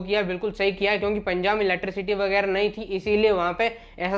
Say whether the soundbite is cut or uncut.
uncut